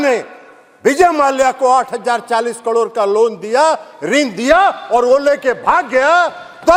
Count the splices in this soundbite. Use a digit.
0